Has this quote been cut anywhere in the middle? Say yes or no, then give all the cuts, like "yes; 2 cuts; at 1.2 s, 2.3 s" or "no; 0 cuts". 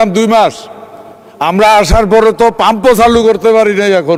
no; 0 cuts